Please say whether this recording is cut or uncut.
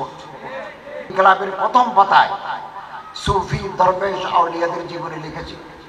cut